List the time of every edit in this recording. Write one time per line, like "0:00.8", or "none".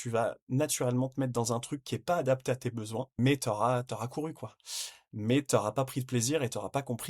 0:03.2